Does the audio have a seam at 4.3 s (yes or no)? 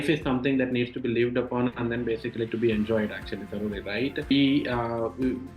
yes